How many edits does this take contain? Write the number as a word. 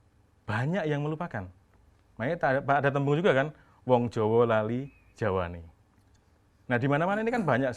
zero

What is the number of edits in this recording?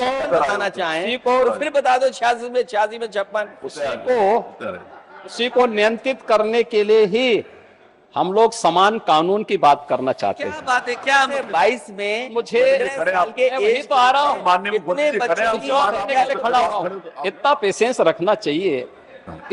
two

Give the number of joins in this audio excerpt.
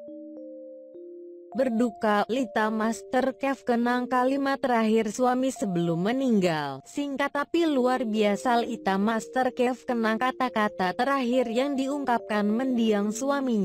one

